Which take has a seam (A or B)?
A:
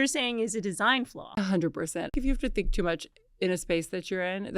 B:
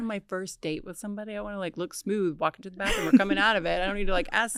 A